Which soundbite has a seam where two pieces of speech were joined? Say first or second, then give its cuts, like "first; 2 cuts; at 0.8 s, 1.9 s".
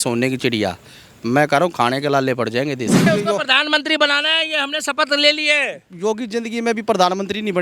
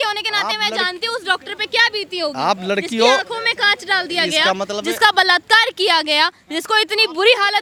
first; 1 cut; at 3.1 s